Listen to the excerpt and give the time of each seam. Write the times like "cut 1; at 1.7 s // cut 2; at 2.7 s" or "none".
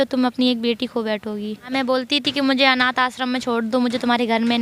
cut 1; at 1.7 s